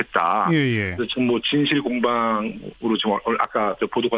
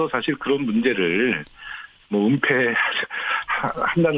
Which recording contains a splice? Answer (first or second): first